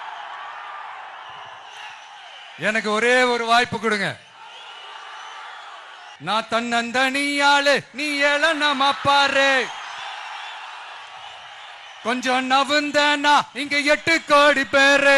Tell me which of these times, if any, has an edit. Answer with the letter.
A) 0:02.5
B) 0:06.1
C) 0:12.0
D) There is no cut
B